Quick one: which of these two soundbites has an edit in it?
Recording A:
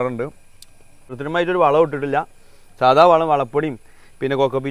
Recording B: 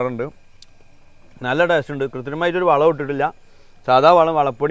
A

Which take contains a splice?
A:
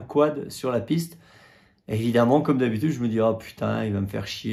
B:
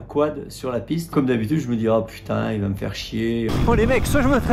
B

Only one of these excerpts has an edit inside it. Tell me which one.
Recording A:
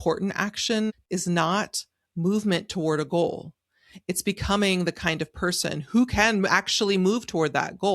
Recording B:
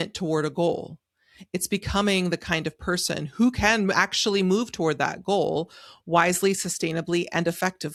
A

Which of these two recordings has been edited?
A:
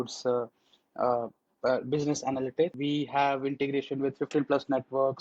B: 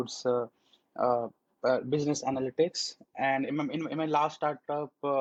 A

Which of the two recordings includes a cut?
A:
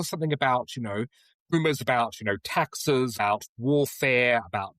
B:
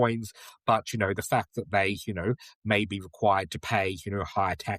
A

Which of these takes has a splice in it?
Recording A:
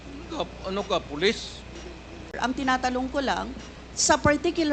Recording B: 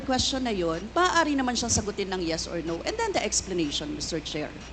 A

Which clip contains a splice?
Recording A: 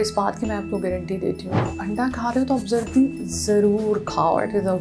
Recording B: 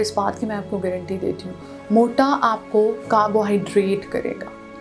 A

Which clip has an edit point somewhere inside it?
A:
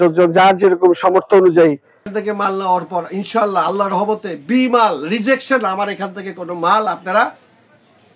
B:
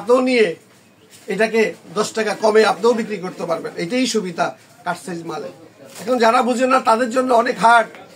A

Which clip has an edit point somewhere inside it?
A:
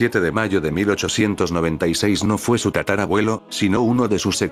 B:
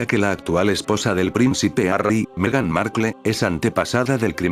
B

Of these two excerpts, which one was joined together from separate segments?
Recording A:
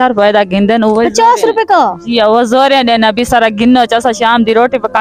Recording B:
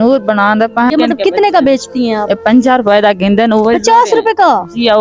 B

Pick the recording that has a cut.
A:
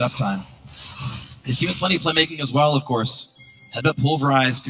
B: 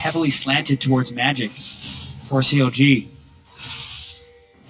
B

